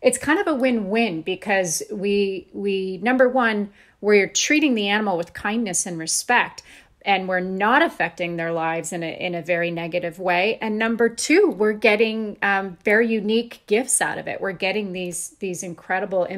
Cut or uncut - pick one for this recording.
uncut